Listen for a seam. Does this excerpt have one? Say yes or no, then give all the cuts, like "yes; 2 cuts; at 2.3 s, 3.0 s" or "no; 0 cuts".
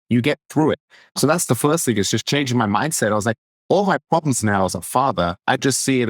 yes; 1 cut; at 1.1 s